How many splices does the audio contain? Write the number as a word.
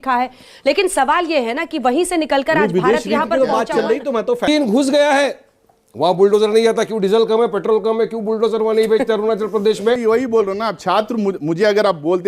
two